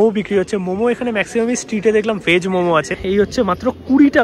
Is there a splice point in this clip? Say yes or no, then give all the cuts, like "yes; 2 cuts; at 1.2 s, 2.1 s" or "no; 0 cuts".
yes; 1 cut; at 3.0 s